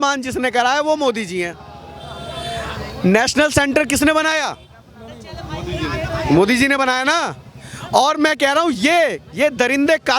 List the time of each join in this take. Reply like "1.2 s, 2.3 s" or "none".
none